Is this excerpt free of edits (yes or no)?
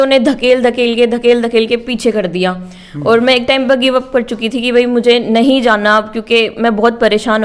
yes